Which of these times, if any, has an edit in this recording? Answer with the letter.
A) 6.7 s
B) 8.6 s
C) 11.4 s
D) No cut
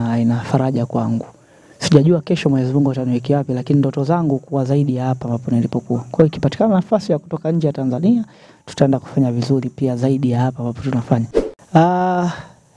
C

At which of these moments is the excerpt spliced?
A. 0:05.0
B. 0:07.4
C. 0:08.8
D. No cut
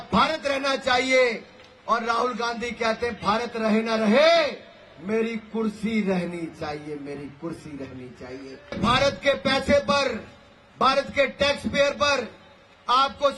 C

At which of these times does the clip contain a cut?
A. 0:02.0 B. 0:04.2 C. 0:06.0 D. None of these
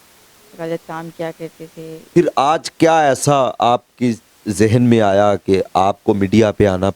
A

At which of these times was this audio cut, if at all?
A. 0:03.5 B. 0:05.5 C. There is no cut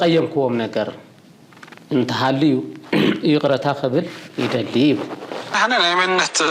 B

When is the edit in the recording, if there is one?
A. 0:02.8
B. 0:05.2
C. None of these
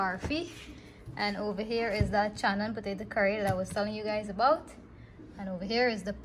C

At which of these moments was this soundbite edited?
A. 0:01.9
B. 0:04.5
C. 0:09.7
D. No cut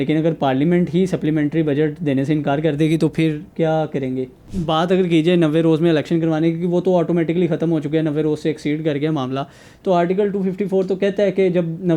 B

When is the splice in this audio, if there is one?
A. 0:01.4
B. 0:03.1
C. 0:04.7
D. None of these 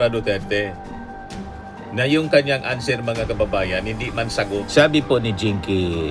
C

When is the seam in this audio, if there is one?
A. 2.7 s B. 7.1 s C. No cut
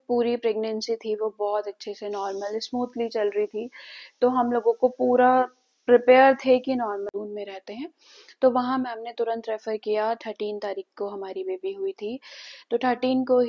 B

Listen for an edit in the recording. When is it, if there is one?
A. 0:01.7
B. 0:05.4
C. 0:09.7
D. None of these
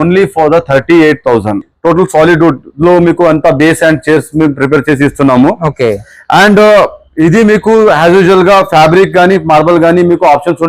A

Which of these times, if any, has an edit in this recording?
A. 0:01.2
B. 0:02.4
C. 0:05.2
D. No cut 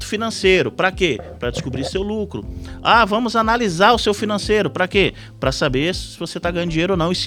D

